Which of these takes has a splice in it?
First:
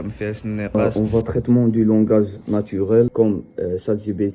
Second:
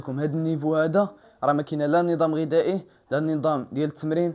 first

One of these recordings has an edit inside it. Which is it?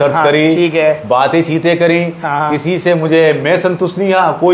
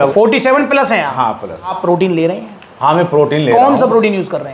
second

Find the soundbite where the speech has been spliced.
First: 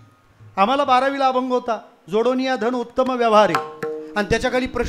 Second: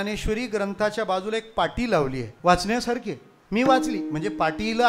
second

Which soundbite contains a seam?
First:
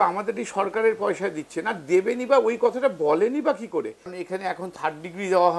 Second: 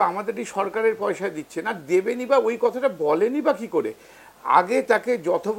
first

